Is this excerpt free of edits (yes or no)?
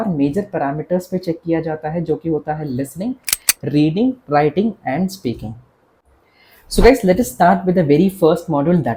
yes